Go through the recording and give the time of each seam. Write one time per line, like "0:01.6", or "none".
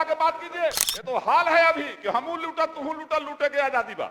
0:00.9